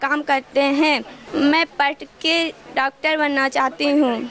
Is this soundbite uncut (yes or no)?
no